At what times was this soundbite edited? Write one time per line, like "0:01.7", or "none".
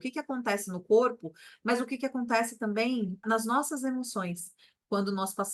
none